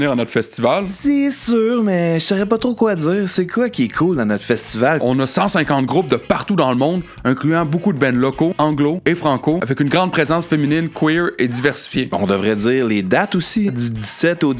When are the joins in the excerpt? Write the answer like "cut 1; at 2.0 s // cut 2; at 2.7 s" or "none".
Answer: none